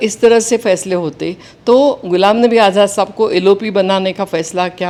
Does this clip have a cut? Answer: no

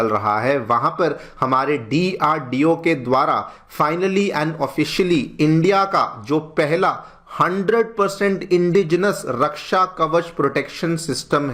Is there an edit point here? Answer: no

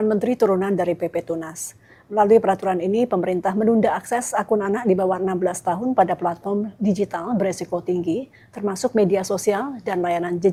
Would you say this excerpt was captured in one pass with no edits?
yes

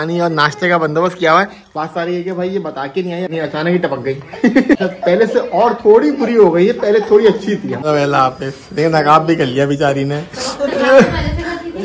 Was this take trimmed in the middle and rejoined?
yes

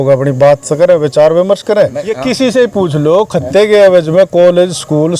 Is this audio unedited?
no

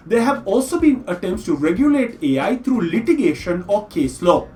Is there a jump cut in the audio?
no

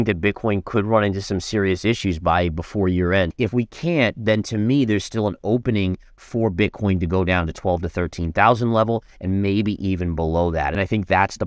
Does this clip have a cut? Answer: yes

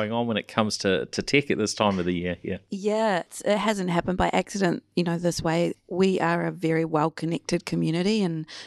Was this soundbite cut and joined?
yes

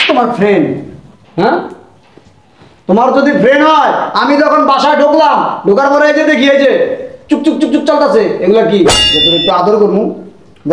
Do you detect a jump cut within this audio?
yes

